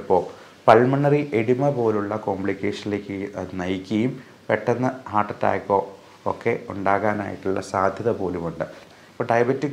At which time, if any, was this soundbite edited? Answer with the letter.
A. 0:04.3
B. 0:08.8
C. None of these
B